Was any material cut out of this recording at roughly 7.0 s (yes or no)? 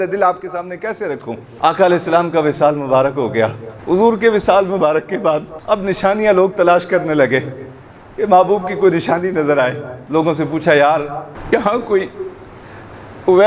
no